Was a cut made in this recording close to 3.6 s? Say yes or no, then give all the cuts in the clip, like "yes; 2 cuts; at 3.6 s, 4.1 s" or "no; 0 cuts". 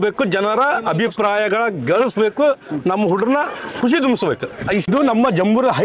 no; 1 cut; at 4.9 s